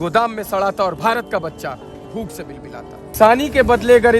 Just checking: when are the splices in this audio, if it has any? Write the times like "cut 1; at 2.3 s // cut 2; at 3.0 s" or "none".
cut 1; at 3.1 s